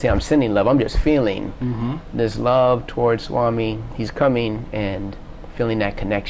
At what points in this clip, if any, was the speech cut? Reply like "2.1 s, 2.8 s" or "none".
none